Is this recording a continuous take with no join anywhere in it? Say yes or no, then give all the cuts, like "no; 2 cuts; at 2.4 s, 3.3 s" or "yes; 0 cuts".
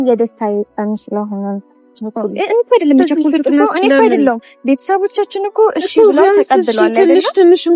no; 1 cut; at 2.1 s